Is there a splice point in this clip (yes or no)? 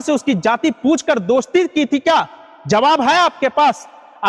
no